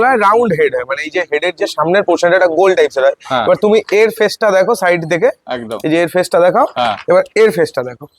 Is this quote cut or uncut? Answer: uncut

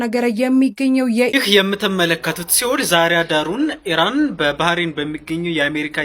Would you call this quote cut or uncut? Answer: cut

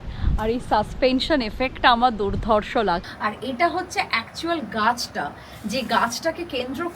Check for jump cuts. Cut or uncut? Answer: cut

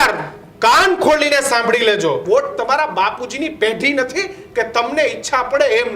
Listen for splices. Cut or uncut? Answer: cut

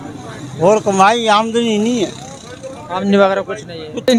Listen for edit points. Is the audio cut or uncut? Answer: uncut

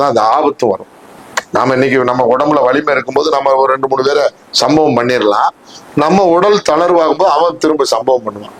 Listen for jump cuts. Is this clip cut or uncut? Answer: uncut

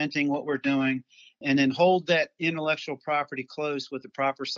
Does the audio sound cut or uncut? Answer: uncut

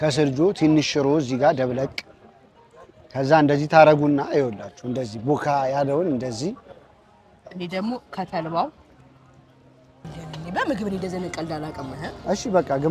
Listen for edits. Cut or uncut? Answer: cut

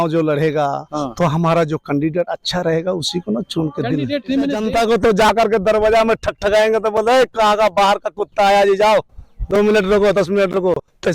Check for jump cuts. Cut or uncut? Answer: cut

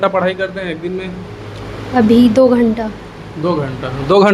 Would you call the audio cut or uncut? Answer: uncut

